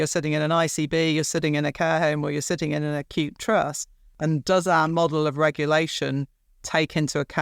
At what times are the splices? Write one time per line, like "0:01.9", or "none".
0:04.1